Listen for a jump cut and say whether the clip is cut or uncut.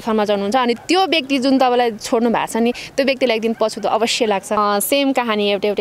cut